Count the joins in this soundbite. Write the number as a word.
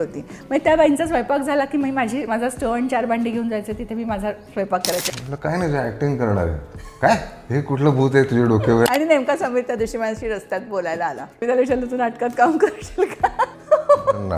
four